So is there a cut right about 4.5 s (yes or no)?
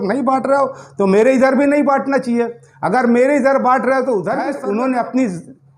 yes